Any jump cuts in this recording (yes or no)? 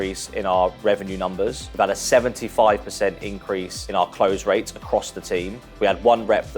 yes